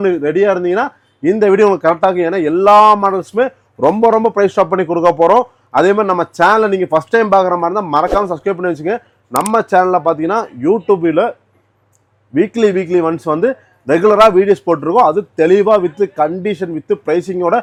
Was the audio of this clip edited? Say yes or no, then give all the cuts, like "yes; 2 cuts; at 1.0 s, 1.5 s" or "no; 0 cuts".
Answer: no; 0 cuts